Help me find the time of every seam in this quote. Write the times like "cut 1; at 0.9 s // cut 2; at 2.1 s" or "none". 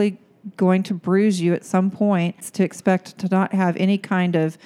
cut 1; at 2.4 s